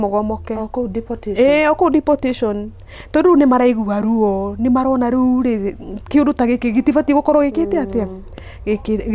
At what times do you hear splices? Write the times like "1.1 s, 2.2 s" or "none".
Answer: none